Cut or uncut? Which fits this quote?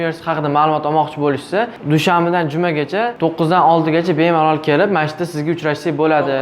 cut